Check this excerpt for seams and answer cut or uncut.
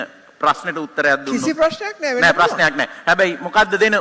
uncut